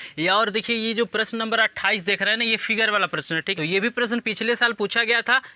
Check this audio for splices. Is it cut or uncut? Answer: cut